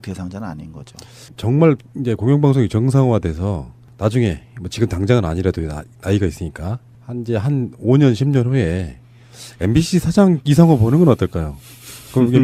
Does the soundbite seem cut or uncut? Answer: uncut